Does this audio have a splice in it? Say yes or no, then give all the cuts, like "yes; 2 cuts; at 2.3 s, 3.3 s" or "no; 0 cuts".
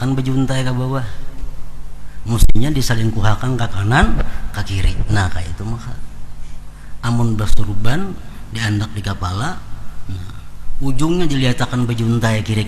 no; 0 cuts